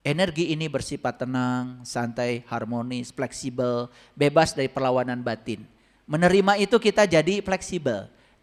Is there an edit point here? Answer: no; 0 cuts

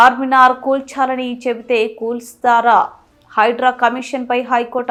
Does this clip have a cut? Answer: no; 0 cuts

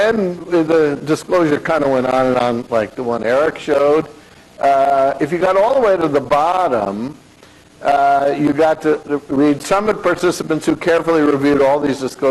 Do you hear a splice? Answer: yes; 1 cut; at 2.7 s

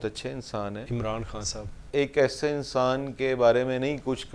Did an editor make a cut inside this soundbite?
yes; 2 cuts; at 0.8 s, 1.8 s

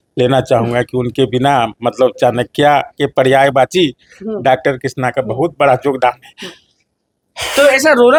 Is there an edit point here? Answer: no; 0 cuts

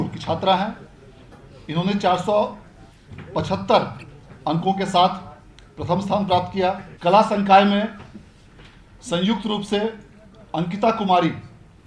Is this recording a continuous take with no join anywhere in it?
no; 1 cut; at 6.9 s

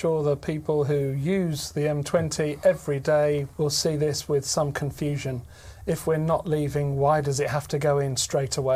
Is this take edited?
yes; 1 cut; at 3.5 s

